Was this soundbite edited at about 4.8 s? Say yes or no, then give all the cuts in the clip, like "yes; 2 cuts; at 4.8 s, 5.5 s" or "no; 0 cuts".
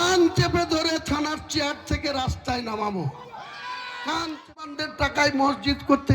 yes; 1 cut; at 4.8 s